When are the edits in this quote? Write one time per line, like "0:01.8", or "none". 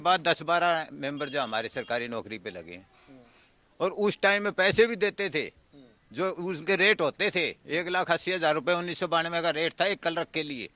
none

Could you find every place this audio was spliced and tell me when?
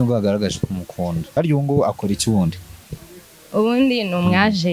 0:01.4

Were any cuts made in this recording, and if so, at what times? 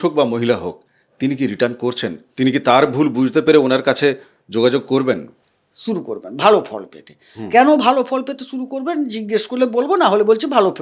0:05.3

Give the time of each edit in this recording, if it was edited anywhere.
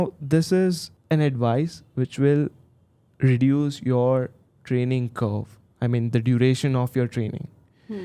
0:00.9

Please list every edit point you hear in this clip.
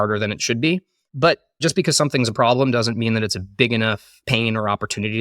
0:01.2
0:04.1

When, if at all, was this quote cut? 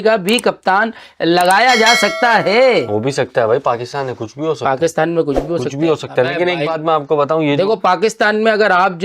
none

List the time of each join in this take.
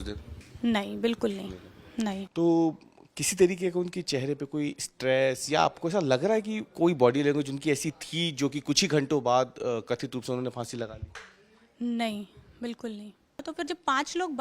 0:02.2
0:13.4

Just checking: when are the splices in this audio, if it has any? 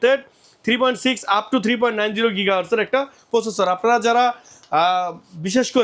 none

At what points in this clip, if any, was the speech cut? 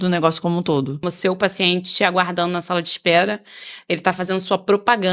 0:01.0

